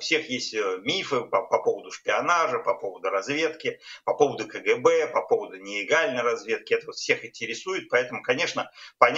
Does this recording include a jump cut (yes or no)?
no